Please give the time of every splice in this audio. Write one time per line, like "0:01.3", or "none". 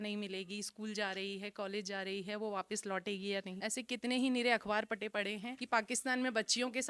none